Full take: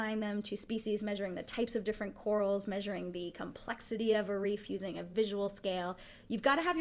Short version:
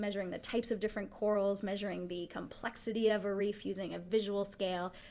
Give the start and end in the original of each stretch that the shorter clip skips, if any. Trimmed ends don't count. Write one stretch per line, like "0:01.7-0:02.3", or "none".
none